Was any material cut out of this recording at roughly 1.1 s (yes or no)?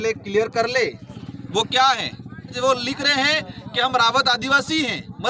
no